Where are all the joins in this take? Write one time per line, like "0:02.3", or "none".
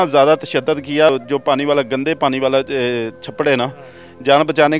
0:01.1